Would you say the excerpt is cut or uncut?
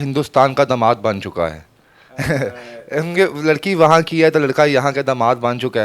uncut